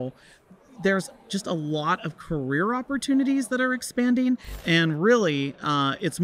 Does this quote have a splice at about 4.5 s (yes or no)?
yes